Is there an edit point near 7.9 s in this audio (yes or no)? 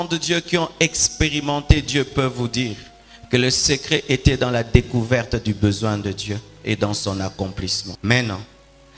yes